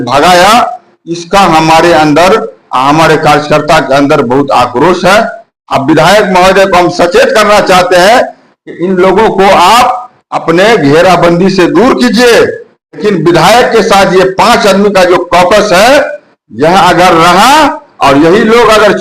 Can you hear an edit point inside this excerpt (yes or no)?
yes